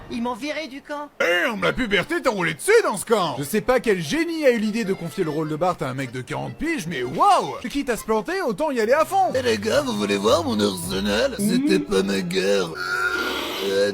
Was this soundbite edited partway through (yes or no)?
yes